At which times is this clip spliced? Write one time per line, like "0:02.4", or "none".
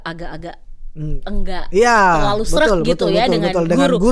none